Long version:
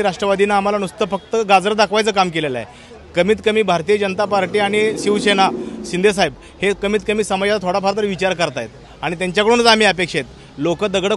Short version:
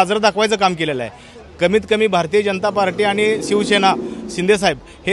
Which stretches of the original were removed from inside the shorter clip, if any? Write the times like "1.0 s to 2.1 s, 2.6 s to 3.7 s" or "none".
none